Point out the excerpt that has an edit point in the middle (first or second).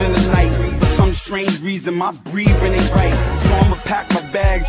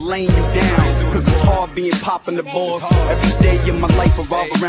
first